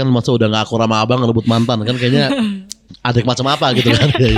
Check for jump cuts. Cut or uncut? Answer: uncut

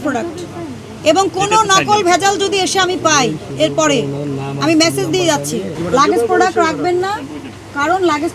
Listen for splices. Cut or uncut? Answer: cut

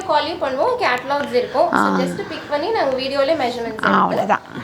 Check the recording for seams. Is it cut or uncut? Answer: uncut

